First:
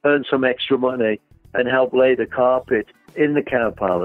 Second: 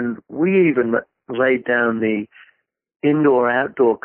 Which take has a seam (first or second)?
first